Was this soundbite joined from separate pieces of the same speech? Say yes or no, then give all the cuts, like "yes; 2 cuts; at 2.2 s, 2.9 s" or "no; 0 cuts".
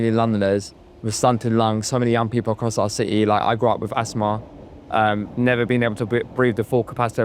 no; 0 cuts